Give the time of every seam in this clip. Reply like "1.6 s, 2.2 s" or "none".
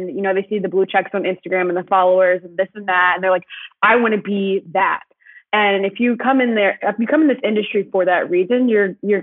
none